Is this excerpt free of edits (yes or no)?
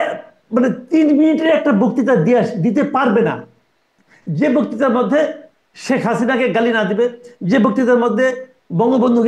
yes